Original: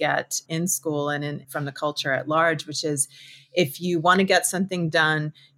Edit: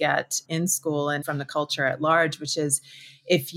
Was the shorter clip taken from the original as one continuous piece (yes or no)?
no